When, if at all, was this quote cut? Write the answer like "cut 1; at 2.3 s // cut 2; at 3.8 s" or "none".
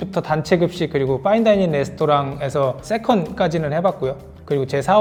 none